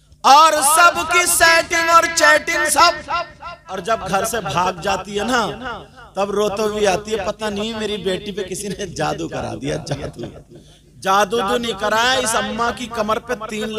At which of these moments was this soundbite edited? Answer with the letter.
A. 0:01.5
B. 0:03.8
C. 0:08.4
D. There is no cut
B